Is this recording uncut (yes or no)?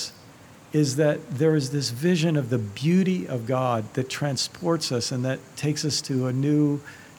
yes